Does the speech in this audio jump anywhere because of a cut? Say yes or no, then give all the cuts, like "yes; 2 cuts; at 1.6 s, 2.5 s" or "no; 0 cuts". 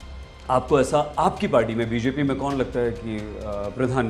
no; 0 cuts